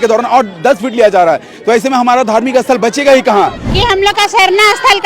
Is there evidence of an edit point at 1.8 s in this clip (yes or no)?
no